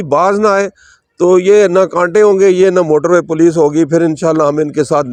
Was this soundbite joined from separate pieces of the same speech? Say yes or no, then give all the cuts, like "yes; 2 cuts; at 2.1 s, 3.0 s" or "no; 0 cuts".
no; 0 cuts